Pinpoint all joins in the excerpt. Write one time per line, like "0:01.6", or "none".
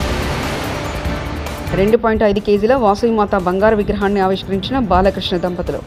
0:01.7